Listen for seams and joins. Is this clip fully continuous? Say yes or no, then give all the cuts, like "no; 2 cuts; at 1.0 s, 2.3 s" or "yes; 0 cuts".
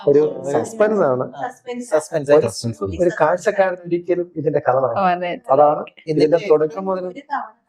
yes; 0 cuts